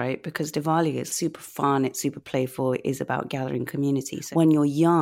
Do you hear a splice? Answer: yes; 2 cuts; at 1.1 s, 4.2 s

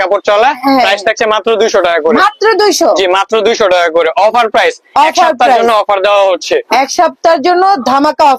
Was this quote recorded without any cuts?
yes; 0 cuts

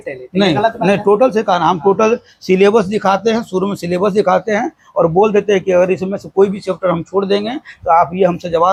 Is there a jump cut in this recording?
no; 0 cuts

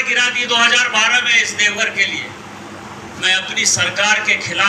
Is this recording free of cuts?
yes; 0 cuts

